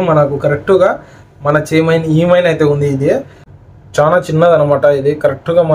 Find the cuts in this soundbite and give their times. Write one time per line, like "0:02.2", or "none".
0:03.5

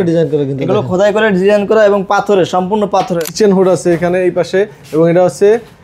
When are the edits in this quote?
0:03.2

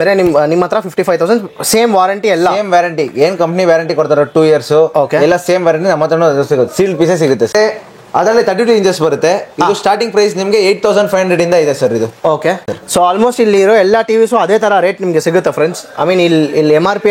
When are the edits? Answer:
0:07.5
0:12.7

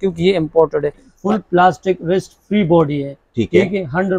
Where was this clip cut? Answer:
0:01.1

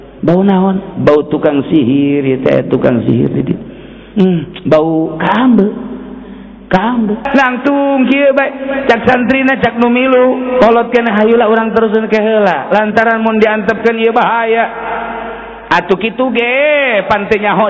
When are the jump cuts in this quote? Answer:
0:07.2

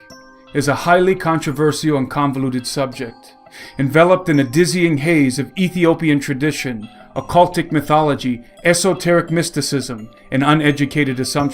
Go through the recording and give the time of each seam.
0:02.7

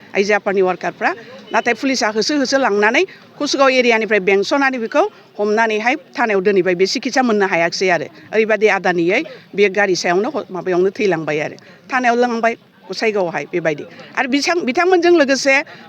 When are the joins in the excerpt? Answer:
none

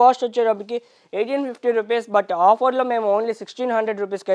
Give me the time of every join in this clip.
none

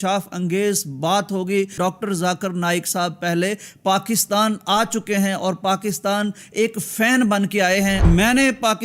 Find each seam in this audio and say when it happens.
0:01.7
0:08.1

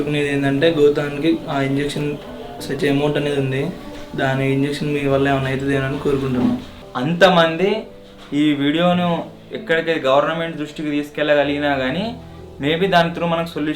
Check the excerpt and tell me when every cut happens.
0:06.8

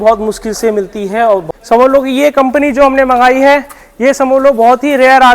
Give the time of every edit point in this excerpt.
0:01.4

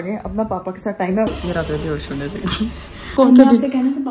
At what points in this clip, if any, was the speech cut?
0:01.3
0:03.1

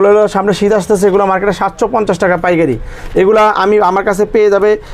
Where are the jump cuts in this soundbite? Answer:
none

